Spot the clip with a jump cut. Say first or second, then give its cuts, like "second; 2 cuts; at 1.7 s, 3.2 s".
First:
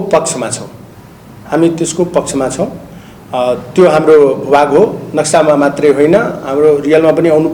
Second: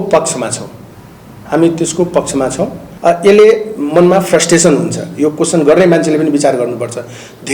second; 1 cut; at 2.8 s